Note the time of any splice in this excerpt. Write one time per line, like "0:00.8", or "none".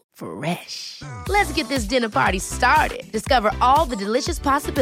none